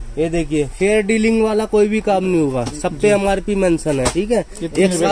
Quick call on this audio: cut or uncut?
uncut